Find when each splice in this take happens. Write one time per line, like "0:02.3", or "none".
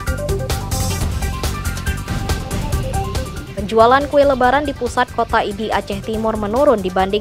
0:03.4